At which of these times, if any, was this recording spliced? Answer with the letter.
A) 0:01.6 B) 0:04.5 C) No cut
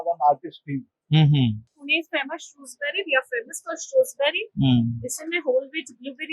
A